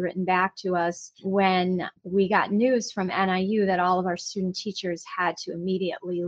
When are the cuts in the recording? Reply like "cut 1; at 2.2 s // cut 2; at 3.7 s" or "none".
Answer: cut 1; at 1.1 s // cut 2; at 2.0 s